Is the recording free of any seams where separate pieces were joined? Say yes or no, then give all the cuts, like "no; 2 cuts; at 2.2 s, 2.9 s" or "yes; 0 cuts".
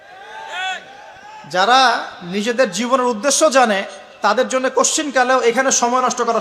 yes; 0 cuts